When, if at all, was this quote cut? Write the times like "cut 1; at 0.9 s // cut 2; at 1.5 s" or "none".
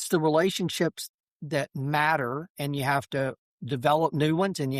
cut 1; at 1.0 s // cut 2; at 3.5 s